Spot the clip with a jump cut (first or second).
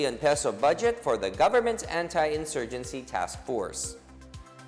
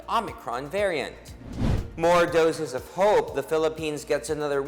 first